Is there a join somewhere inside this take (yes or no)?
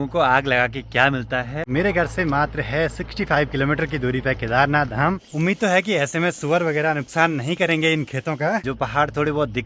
yes